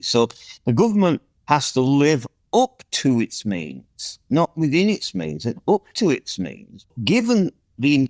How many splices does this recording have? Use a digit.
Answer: 1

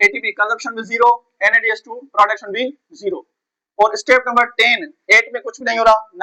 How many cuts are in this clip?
0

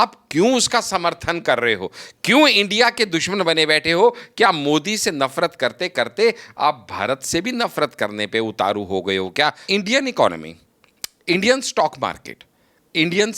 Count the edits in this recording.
1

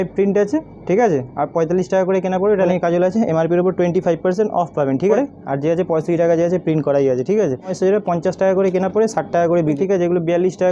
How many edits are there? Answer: 4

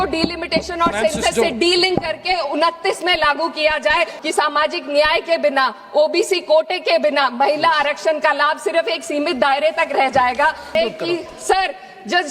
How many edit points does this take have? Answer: 2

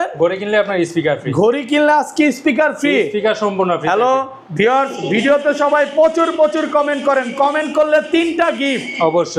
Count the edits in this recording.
0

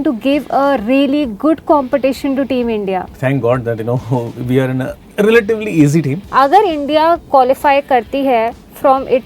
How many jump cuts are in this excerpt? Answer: 2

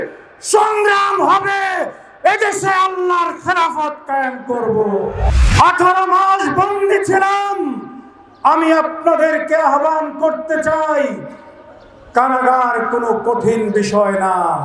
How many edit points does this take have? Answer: 1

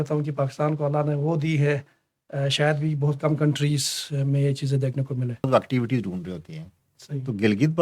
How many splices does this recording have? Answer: 1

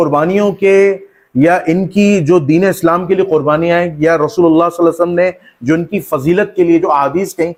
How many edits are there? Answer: 0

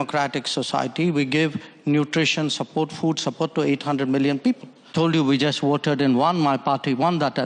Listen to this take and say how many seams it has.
1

